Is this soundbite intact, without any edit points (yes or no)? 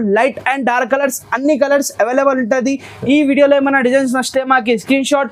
yes